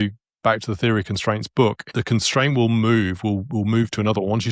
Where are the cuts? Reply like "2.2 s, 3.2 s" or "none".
1.8 s